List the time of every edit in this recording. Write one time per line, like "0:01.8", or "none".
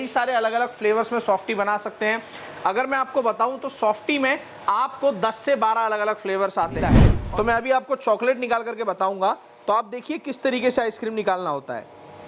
0:07.1